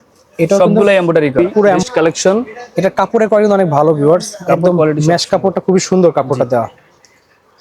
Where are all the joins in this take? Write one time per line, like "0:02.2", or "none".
0:01.8